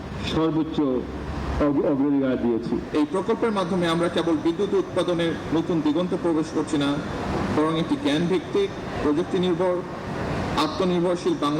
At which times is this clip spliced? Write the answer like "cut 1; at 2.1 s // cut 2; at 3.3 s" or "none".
cut 1; at 2.8 s

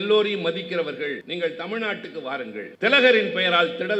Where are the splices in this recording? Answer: cut 1; at 1.2 s // cut 2; at 2.7 s

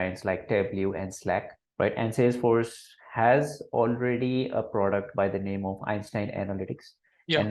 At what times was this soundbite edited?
cut 1; at 1.6 s

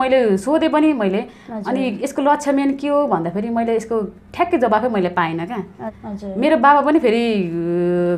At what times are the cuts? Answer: cut 1; at 5.9 s

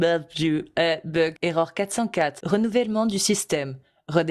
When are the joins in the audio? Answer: cut 1; at 1.4 s // cut 2; at 2.4 s

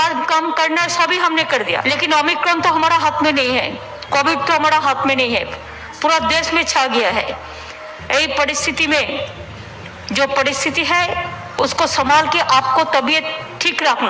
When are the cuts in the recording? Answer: cut 1; at 1.8 s

